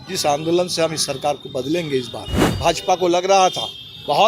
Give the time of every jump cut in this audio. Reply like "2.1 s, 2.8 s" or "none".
2.5 s